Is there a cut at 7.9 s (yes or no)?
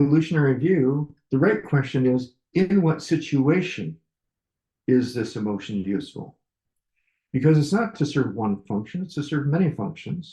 no